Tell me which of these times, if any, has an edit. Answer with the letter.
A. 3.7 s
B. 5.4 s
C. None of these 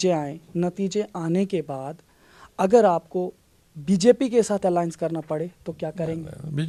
C